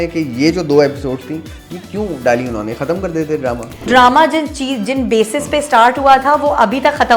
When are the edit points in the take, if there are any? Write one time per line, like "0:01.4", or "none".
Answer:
0:03.9